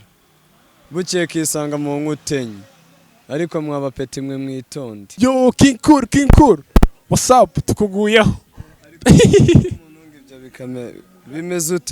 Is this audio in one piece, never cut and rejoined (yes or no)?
no